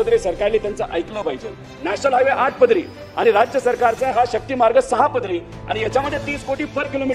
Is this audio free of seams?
no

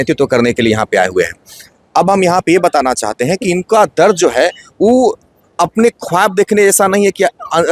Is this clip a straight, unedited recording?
yes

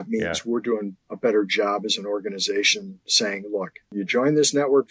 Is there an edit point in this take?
yes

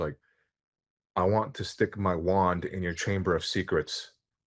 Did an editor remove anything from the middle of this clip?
no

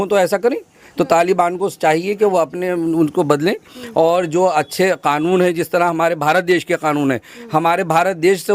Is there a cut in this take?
no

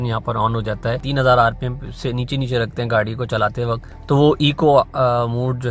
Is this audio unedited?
no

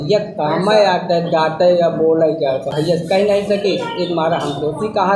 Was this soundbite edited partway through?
yes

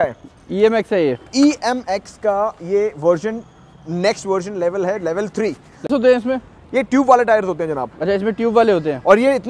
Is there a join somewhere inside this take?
yes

